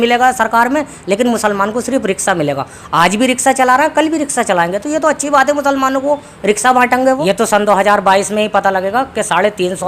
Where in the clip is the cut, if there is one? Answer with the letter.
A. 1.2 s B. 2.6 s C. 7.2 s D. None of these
C